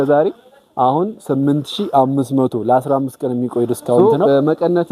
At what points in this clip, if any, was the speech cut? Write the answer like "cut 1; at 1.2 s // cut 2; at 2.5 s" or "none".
cut 1; at 4.0 s